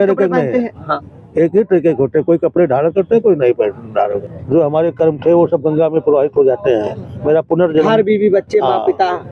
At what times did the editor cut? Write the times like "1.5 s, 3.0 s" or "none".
4.1 s